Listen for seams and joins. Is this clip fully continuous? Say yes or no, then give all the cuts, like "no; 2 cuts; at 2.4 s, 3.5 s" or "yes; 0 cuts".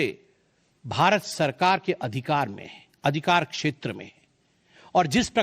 no; 1 cut; at 1.3 s